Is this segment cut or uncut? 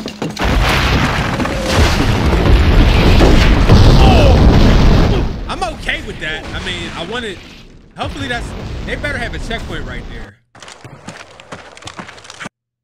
uncut